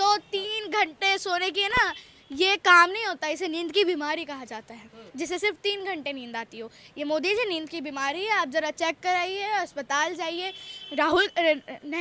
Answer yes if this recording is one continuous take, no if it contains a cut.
yes